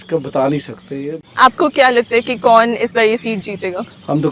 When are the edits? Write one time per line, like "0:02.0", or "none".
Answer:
0:01.2